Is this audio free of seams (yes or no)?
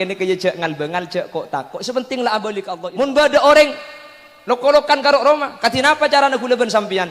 no